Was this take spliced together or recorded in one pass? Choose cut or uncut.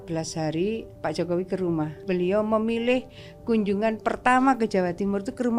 cut